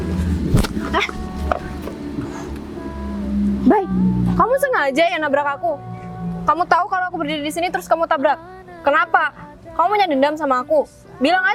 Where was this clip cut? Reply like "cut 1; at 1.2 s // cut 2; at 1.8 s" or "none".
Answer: none